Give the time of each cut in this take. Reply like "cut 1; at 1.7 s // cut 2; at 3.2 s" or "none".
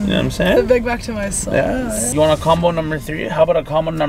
cut 1; at 2.1 s